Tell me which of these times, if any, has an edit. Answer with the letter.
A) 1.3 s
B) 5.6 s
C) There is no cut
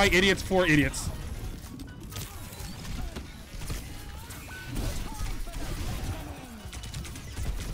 C